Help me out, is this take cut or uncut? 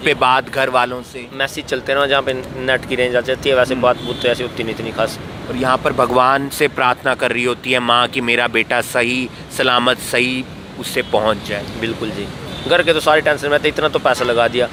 uncut